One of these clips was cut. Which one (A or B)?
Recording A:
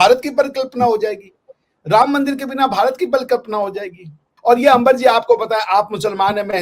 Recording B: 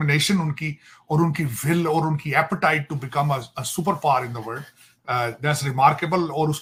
A